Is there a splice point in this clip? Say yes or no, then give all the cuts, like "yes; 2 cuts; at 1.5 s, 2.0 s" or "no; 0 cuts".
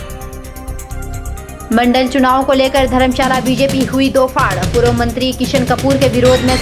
yes; 1 cut; at 1.0 s